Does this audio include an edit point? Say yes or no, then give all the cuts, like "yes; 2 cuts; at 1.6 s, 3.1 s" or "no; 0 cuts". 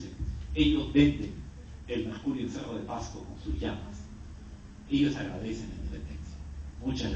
yes; 1 cut; at 2.7 s